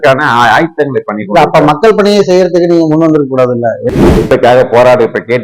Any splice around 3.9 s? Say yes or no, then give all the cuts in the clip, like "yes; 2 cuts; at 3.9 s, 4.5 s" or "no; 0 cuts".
yes; 1 cut; at 3.9 s